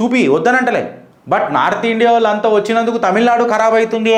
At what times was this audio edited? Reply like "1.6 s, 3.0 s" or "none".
none